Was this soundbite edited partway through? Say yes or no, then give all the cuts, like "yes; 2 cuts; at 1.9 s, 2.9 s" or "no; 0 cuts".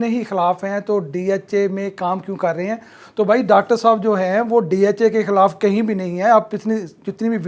no; 0 cuts